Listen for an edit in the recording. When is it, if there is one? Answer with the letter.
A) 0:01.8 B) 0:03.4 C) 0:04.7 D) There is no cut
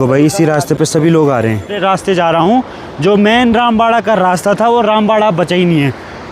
A